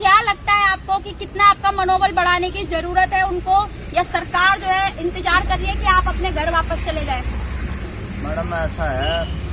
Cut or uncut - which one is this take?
uncut